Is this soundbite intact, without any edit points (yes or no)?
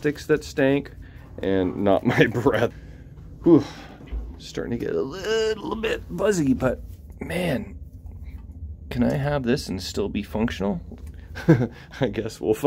no